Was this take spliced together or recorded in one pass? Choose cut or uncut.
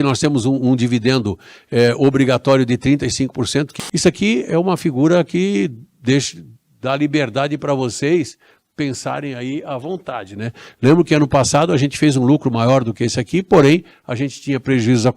cut